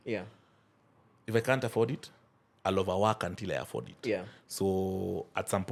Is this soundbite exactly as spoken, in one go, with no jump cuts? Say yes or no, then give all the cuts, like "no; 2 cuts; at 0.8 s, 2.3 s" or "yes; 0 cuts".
yes; 0 cuts